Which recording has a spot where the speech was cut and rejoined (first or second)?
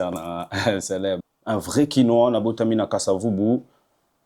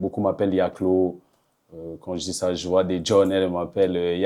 first